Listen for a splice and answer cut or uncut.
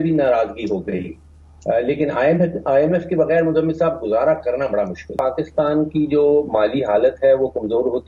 cut